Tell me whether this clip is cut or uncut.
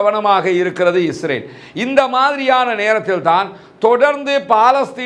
uncut